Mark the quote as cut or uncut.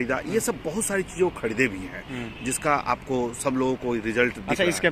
uncut